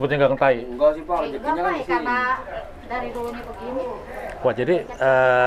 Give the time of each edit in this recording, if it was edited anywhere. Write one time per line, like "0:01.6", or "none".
none